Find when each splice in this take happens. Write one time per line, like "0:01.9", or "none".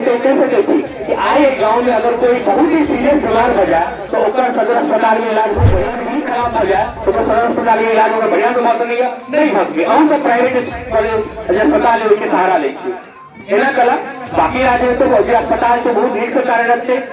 0:05.9